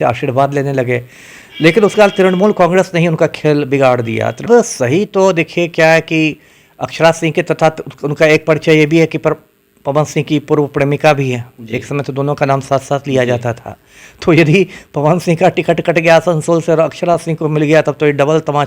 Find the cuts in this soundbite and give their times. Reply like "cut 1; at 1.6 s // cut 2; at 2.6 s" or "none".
cut 1; at 4.5 s